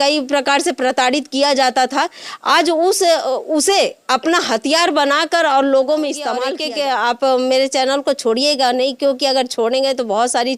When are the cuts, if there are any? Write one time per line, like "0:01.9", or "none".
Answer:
0:06.5